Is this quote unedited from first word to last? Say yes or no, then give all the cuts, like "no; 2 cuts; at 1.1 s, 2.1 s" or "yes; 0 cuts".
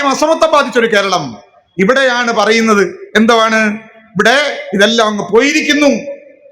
yes; 0 cuts